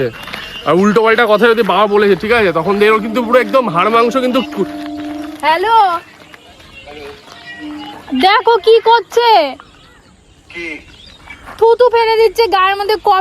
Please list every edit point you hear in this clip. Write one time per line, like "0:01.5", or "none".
none

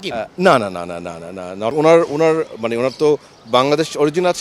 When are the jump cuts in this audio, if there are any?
0:01.7

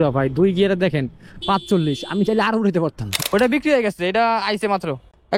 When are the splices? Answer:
0:03.3

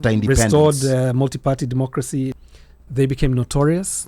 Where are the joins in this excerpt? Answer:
0:02.5

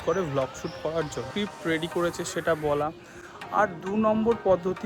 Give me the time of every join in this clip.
0:01.3

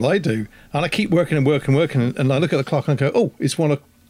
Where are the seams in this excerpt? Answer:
none

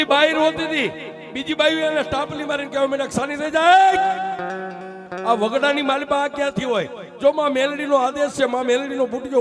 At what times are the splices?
none

